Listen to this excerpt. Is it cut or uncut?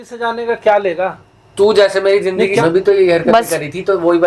cut